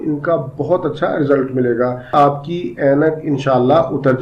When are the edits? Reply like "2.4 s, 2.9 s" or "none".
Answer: 2.1 s